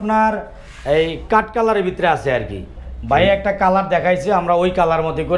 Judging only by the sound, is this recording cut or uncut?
uncut